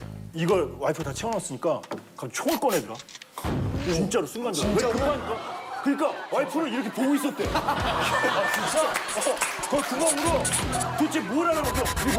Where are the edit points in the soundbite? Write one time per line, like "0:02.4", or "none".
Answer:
none